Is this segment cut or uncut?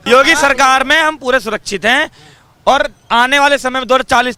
uncut